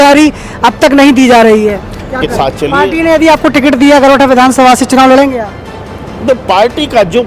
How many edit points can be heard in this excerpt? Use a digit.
1